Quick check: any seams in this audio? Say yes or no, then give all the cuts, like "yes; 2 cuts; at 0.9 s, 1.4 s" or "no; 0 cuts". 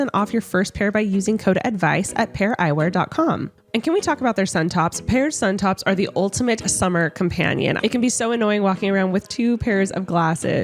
yes; 1 cut; at 3.6 s